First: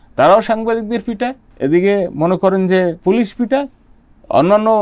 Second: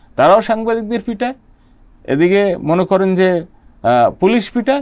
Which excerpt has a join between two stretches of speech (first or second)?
first